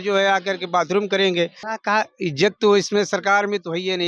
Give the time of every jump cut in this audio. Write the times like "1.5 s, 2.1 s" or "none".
1.6 s